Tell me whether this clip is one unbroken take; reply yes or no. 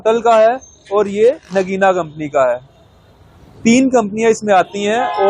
yes